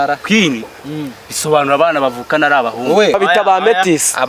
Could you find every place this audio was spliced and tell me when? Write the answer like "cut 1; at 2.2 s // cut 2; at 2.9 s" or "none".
cut 1; at 3.1 s